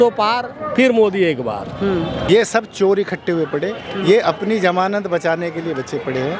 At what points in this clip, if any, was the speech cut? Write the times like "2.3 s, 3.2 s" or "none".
none